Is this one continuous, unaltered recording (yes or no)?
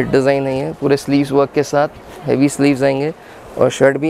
yes